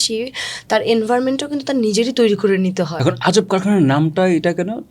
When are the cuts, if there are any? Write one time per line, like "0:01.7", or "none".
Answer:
0:02.9